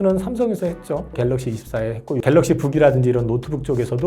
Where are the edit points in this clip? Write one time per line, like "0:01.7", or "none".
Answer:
0:01.1
0:02.2

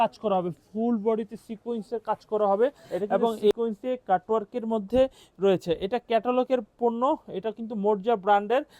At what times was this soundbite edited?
0:03.5

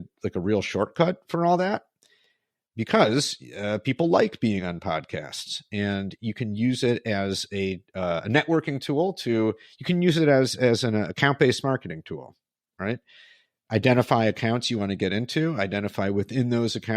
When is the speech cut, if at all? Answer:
none

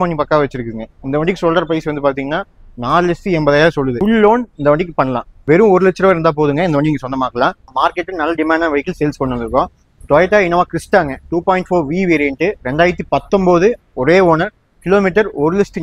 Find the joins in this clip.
0:05.3
0:07.7

